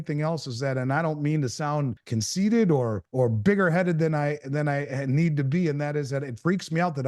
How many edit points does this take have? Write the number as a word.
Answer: two